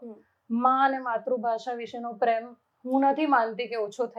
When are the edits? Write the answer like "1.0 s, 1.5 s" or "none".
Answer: none